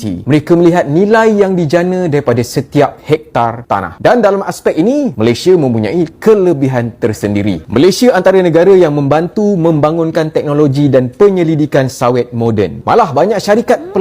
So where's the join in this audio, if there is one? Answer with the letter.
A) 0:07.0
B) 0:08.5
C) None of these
C